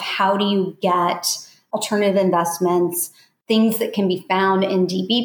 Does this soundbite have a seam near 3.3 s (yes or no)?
yes